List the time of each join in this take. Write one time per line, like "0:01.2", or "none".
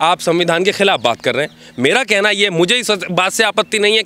none